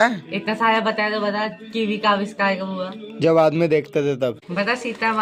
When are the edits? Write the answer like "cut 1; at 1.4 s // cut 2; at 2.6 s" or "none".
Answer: none